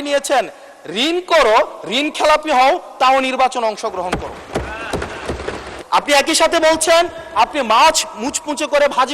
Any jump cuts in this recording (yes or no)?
yes